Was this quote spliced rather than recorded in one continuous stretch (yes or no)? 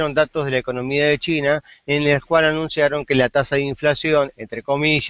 yes